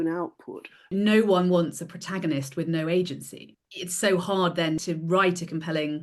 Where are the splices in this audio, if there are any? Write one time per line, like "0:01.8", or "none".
0:00.9
0:03.4
0:04.8